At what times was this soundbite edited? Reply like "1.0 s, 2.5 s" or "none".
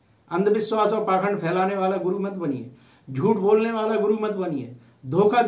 none